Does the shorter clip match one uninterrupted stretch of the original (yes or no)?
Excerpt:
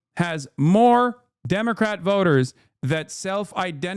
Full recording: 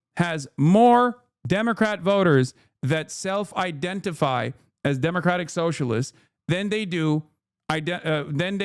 yes